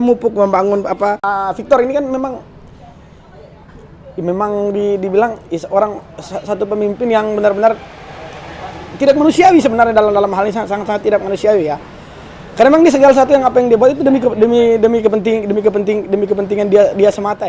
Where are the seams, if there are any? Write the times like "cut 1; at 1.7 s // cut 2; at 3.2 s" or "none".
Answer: cut 1; at 1.3 s